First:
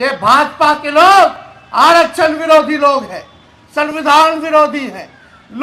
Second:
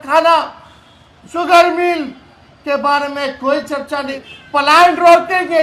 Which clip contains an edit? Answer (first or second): second